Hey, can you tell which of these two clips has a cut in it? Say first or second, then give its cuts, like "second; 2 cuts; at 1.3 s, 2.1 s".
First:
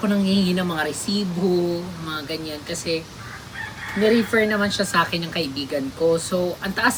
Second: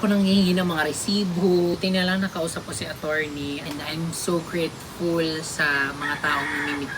second; 2 cuts; at 1.7 s, 3.6 s